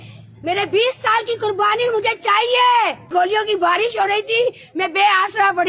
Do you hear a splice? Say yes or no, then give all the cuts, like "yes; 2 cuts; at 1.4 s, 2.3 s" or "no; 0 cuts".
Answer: yes; 1 cut; at 3.0 s